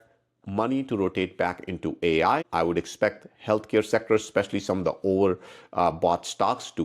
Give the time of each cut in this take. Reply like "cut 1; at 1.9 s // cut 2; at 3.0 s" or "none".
cut 1; at 2.5 s